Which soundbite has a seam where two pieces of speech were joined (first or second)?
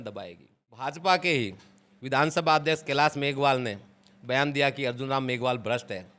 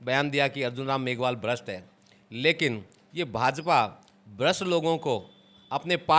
first